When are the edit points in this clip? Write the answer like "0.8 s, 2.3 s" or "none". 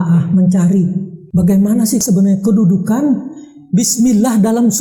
none